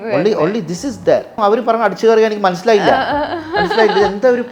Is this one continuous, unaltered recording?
no; 1 cut; at 1.4 s

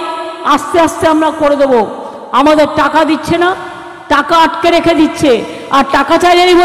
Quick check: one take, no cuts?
yes; 0 cuts

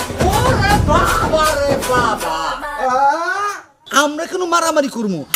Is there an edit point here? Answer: yes; 1 cut; at 3.2 s

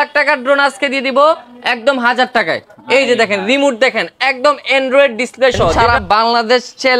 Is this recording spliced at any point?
yes; 1 cut; at 5.8 s

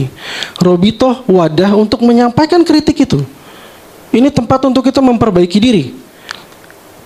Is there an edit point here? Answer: no; 0 cuts

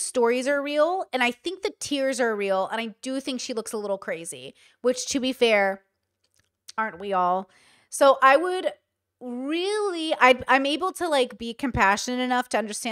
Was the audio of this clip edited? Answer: no; 0 cuts

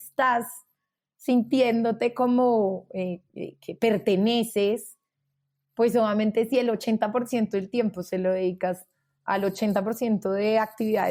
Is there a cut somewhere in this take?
no; 0 cuts

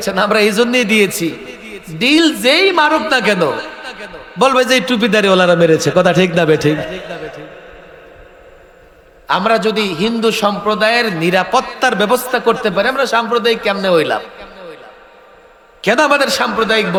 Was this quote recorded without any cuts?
yes; 0 cuts

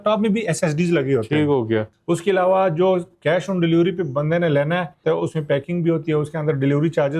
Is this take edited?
yes; 2 cuts; at 1.9 s, 5.0 s

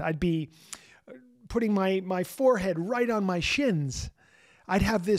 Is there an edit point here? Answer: no; 0 cuts

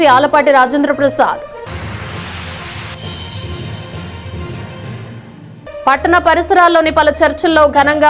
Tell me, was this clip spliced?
no; 0 cuts

